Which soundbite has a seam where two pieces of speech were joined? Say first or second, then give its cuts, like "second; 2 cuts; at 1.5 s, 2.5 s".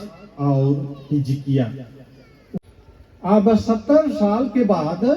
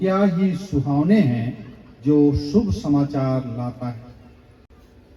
first; 1 cut; at 2.6 s